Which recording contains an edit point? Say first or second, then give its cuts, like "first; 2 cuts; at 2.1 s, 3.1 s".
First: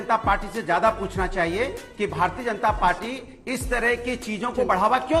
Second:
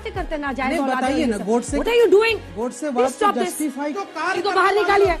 second; 1 cut; at 3.9 s